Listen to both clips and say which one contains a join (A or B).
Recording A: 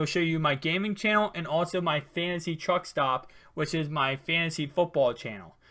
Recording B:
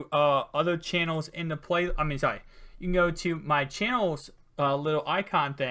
B